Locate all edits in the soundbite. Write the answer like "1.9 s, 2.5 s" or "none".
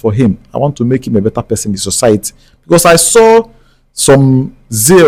none